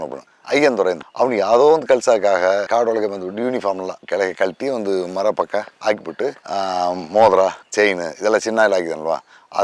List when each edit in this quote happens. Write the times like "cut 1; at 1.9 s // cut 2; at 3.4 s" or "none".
none